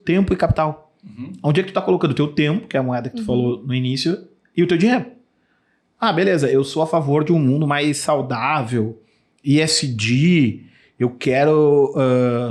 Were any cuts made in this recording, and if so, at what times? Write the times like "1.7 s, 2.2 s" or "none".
none